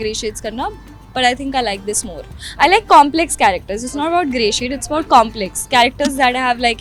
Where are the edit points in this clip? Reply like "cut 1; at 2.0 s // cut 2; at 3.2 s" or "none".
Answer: none